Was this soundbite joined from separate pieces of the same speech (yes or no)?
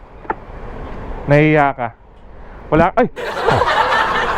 no